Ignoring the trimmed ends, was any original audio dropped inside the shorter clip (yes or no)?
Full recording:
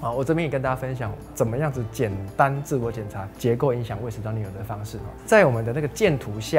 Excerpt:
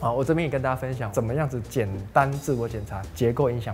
yes